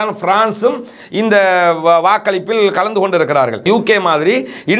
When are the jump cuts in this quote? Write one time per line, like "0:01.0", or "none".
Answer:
0:03.6

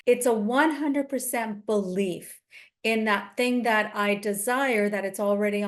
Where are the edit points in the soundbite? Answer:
none

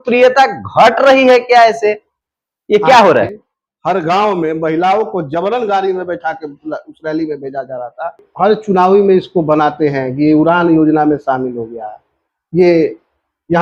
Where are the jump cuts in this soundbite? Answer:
0:03.3
0:08.2

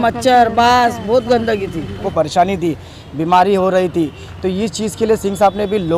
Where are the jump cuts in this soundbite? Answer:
0:02.1

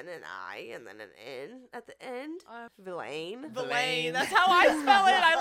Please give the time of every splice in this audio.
0:02.7

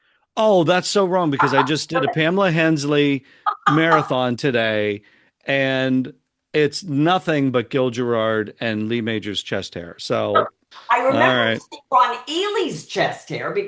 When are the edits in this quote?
0:10.7

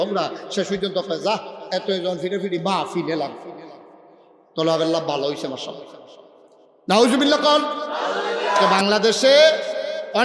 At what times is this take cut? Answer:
0:08.6

